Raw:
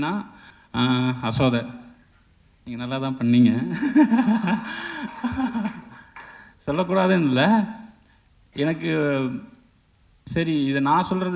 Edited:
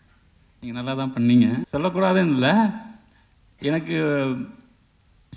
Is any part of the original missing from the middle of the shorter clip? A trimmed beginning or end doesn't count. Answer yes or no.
yes